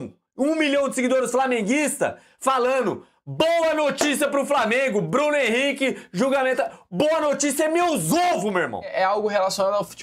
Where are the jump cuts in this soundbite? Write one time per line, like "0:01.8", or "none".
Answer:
0:08.9